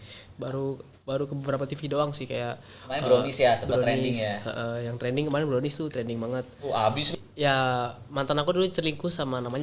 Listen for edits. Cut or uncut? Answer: cut